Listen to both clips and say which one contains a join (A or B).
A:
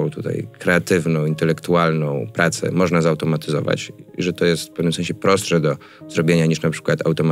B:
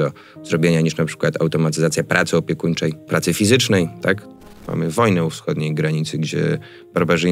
B